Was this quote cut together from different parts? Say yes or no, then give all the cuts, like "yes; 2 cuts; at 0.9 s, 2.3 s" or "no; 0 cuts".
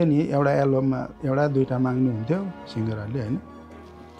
no; 0 cuts